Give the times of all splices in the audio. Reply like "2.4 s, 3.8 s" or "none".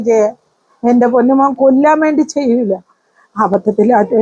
none